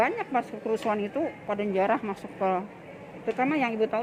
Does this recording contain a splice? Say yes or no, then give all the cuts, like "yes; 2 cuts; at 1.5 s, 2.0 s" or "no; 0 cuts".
no; 0 cuts